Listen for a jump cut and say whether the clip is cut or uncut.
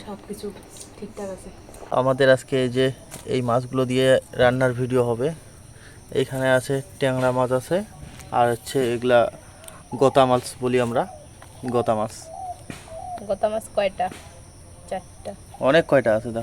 cut